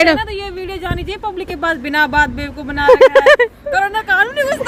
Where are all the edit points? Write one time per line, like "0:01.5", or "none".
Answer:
none

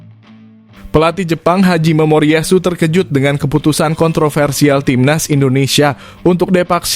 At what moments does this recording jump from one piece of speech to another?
0:00.9

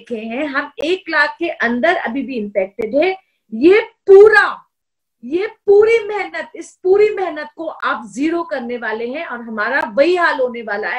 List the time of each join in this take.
none

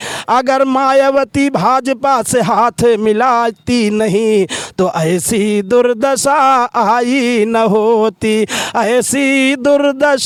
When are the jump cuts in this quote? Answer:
none

